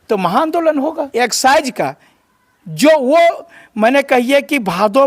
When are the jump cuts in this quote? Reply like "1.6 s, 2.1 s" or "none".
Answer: 1.0 s